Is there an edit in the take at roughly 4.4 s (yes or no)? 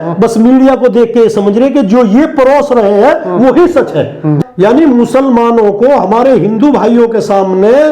yes